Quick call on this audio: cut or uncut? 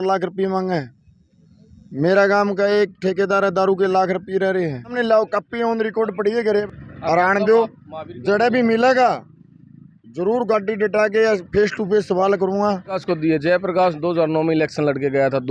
cut